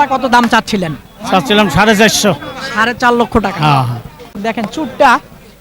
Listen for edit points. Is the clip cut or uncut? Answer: cut